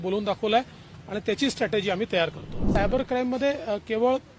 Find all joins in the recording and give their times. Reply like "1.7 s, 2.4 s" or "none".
2.6 s